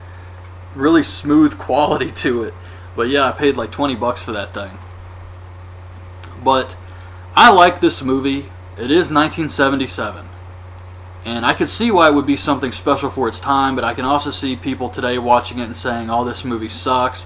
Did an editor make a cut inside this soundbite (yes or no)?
yes